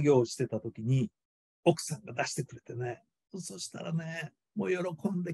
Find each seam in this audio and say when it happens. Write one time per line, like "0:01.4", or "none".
0:04.4